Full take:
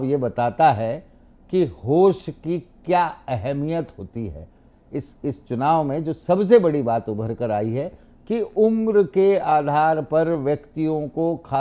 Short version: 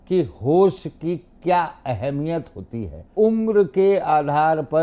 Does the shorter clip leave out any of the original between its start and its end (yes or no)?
yes